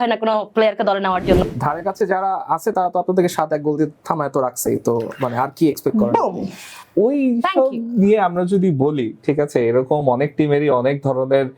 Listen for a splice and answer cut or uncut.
cut